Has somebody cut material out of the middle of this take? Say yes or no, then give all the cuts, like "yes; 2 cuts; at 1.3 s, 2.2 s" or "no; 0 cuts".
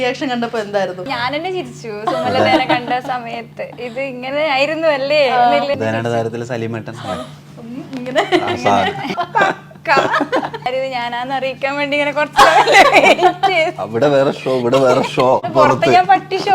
yes; 5 cuts; at 1.1 s, 5.7 s, 9.1 s, 10.7 s, 15.5 s